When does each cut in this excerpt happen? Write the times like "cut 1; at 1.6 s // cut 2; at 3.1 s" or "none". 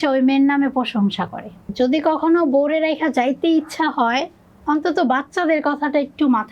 cut 1; at 1.7 s